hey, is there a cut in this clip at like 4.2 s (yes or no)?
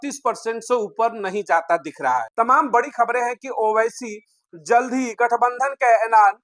no